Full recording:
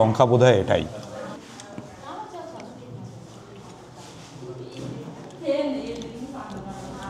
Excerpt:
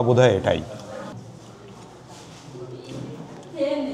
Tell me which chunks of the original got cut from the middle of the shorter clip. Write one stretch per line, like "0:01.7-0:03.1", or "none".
0:01.4-0:03.0